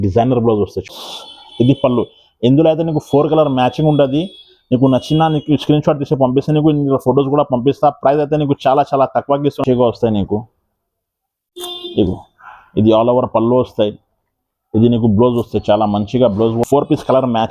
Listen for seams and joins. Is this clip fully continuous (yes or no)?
no